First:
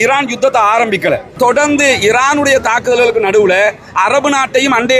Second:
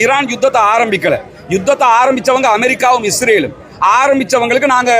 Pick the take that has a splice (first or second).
first